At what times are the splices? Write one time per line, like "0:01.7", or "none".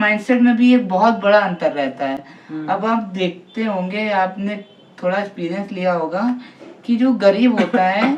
none